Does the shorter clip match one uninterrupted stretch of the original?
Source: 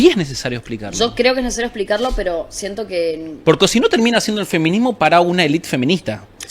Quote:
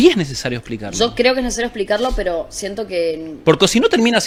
yes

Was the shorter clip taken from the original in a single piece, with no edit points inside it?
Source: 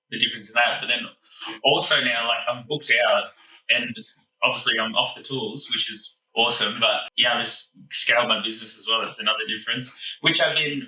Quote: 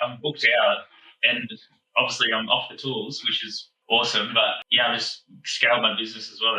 yes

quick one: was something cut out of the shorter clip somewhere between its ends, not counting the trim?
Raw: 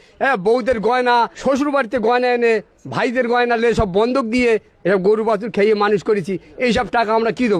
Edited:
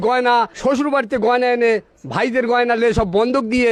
no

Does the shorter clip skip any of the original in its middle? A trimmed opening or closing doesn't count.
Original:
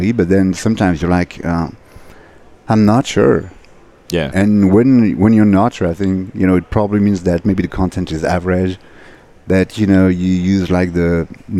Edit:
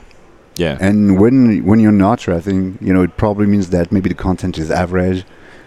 no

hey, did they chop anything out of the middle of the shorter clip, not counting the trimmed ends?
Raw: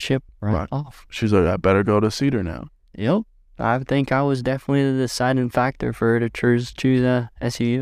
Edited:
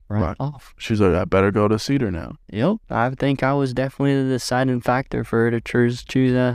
yes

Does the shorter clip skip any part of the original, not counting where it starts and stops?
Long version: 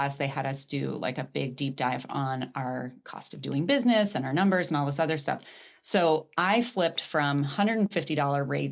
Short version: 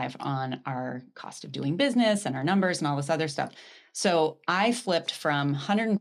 no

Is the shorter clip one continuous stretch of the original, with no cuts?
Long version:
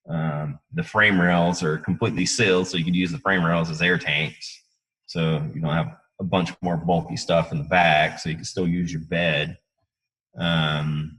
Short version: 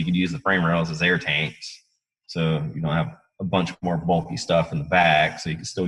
yes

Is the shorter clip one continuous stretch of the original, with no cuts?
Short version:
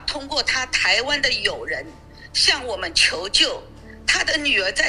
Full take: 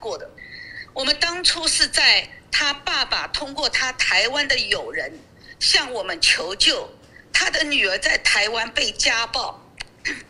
yes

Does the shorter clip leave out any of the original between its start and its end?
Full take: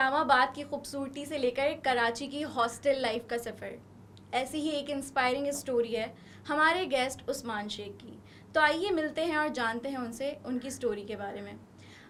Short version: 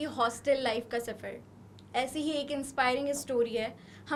no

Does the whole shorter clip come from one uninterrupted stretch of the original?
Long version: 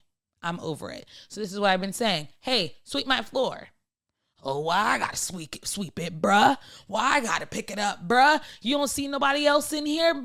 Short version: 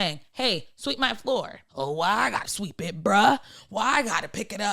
no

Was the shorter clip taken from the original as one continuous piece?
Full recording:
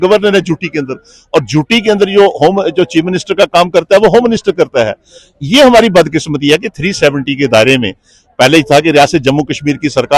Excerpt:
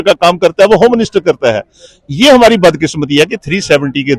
yes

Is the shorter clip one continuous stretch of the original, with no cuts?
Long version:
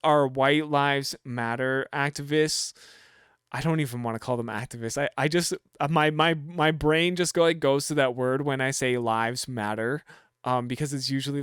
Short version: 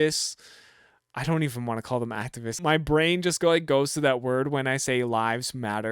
no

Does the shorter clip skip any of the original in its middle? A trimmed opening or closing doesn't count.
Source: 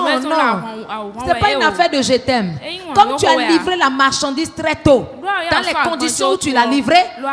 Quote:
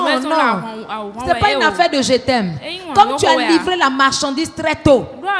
no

